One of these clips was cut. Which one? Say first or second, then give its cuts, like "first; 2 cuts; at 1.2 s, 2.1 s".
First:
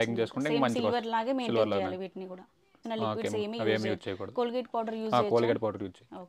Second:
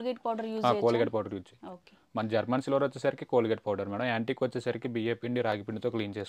first; 1 cut; at 2.8 s